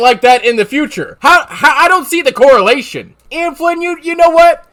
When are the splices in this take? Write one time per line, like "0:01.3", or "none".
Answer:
none

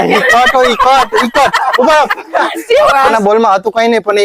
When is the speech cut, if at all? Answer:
0:03.1

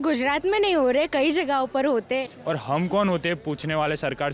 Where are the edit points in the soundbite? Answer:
0:02.3

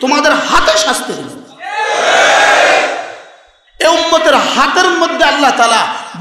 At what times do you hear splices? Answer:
none

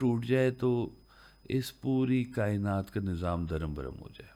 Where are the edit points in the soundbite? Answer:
none

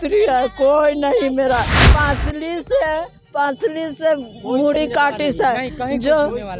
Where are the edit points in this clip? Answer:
0:01.8

